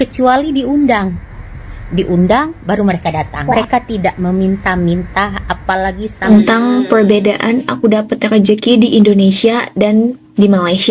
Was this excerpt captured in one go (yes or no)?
no